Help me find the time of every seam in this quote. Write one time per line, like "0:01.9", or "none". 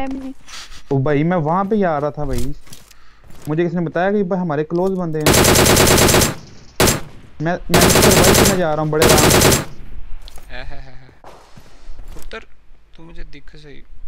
0:11.3

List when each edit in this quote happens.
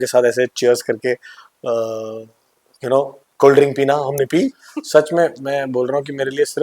0:04.6

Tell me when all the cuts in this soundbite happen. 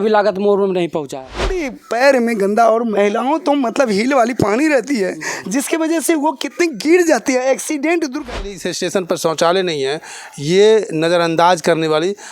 0:01.7
0:08.4

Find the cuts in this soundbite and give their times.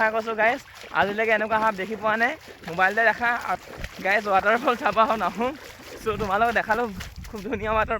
0:03.6
0:05.8

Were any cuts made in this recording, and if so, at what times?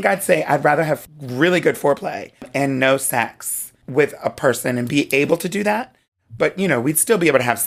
0:01.0
0:02.5
0:03.8

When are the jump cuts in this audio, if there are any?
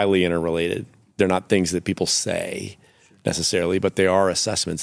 0:01.0

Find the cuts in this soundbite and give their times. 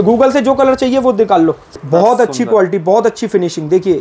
0:01.7

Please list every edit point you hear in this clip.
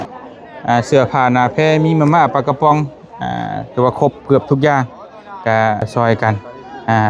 0:05.9

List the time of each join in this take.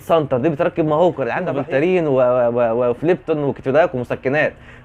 0:01.5

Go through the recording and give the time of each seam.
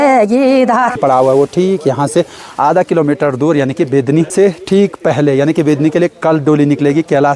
0:01.0
0:04.3

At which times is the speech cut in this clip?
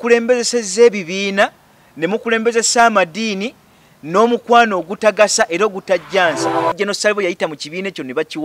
0:06.8

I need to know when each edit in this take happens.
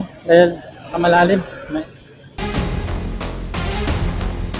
none

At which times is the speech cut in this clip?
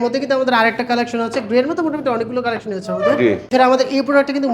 0:03.5

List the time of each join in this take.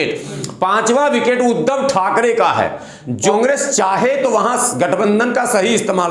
0:03.3

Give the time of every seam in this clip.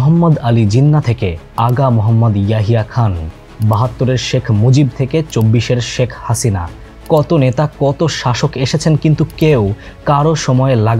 none

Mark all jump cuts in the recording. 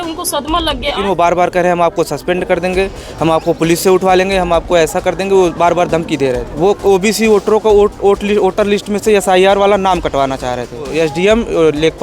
0:01.0
0:06.5
0:10.9

